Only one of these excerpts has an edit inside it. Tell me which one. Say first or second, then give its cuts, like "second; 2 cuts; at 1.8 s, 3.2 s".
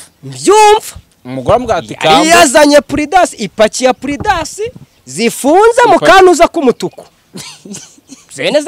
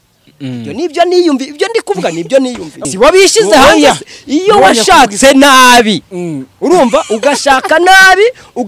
second; 1 cut; at 2.8 s